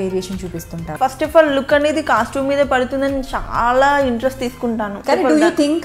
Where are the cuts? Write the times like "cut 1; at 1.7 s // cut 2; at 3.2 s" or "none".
cut 1; at 1.0 s // cut 2; at 5.0 s